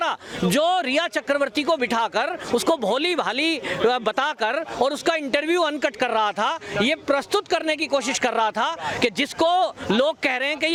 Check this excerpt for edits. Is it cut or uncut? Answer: uncut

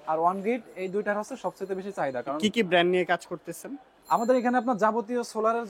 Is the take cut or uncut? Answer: uncut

